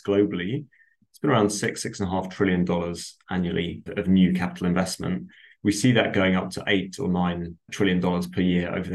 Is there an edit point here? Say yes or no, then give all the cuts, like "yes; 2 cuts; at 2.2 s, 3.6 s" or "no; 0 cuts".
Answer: no; 0 cuts